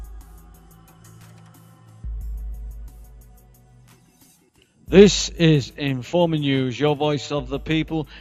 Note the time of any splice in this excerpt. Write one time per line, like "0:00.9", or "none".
none

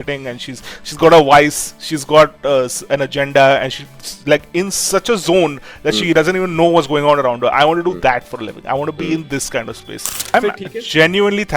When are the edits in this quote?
0:10.3

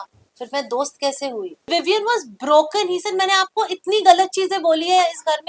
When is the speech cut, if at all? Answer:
0:01.7

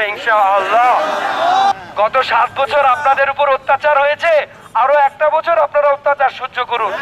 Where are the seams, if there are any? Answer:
0:01.7

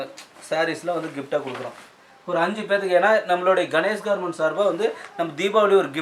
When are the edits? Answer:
none

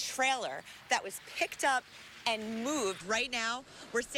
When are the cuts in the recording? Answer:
0:03.0

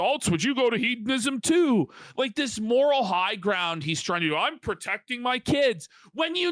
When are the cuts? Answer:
none

